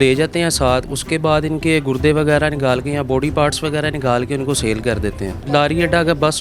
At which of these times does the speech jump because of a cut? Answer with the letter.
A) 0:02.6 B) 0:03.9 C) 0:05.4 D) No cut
C